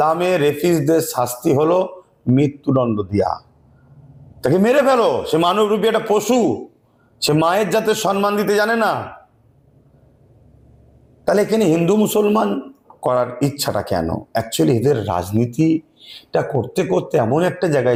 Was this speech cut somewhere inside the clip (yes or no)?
no